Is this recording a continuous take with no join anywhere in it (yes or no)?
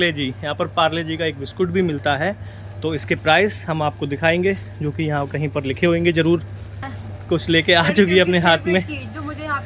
no